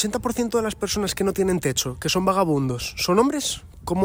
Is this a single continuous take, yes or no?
yes